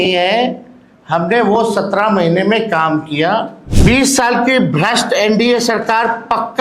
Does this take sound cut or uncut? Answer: cut